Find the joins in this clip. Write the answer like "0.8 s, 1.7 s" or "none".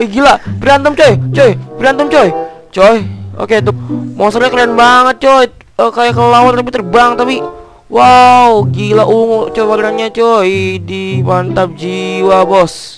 3.7 s